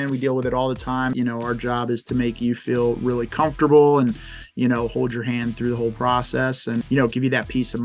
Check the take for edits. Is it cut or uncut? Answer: cut